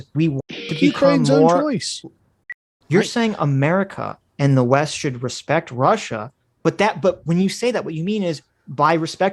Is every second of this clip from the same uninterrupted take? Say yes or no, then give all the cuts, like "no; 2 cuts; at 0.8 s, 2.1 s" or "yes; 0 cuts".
no; 1 cut; at 2.5 s